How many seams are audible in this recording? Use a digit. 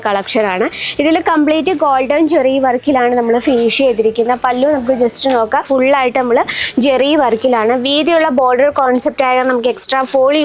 1